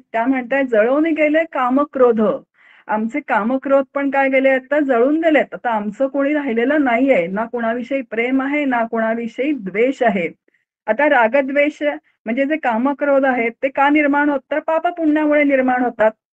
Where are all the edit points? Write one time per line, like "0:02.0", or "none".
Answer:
none